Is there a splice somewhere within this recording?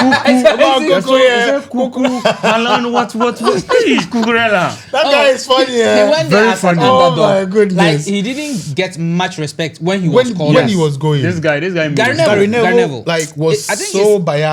no; 0 cuts

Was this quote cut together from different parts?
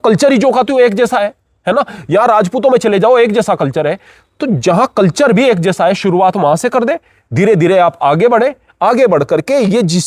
no; 0 cuts

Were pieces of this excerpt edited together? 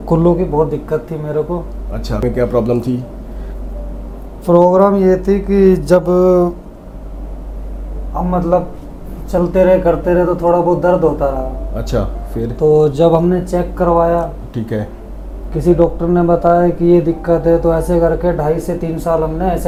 no; 0 cuts

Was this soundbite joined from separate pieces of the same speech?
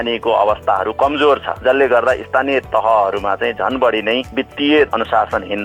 no; 0 cuts

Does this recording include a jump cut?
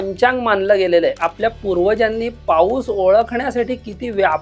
yes; 1 cut; at 1.2 s

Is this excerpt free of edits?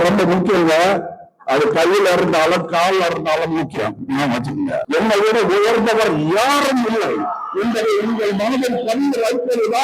no; 1 cut; at 4.8 s

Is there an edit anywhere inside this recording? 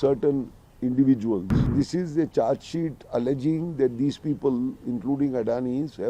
yes; 1 cut; at 1.7 s

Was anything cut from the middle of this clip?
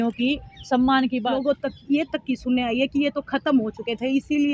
yes; 1 cut; at 1.2 s

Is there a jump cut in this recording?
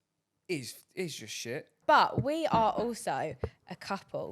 yes; 1 cut; at 1.8 s

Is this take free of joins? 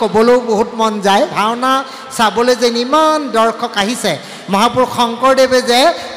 no; 1 cut; at 1.3 s

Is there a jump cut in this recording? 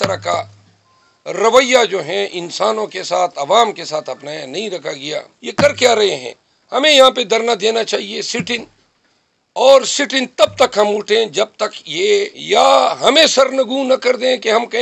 yes; 2 cuts; at 5.4 s, 12.4 s

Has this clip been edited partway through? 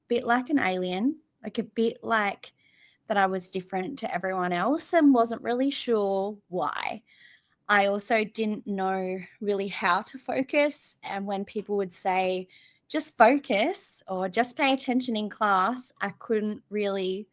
no; 0 cuts

